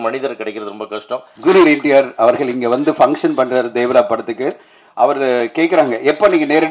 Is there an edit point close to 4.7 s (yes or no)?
no